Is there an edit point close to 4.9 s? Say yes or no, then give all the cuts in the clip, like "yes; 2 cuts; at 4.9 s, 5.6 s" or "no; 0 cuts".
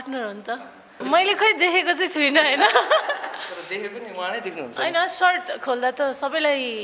no; 1 cut; at 0.9 s